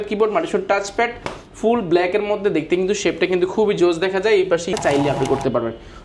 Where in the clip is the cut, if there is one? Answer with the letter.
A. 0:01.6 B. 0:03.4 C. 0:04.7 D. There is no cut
C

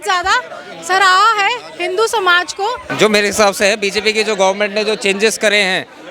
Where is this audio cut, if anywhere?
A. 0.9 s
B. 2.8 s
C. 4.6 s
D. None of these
B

